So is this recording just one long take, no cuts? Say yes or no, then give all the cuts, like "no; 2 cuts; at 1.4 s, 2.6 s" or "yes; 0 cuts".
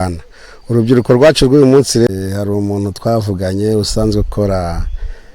no; 1 cut; at 2.1 s